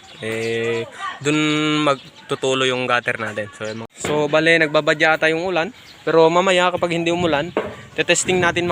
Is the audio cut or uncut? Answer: cut